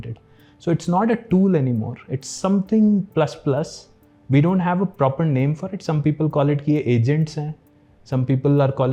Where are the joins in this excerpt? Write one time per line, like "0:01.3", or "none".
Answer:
none